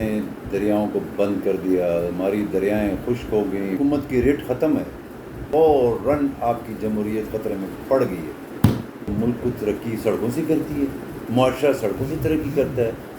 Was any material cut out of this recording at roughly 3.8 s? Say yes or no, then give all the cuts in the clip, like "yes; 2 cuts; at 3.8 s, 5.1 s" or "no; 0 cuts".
yes; 3 cuts; at 3.8 s, 5.4 s, 9.0 s